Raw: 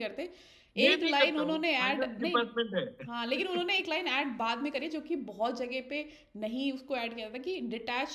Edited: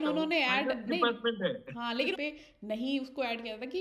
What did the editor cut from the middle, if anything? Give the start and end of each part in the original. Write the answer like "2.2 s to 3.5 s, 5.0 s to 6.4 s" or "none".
3.5 s to 5.9 s